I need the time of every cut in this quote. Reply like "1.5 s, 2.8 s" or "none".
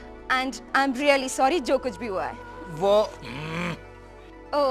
none